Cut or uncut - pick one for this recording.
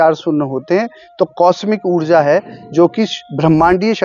uncut